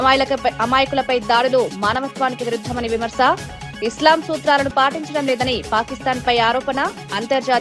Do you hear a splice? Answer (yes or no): no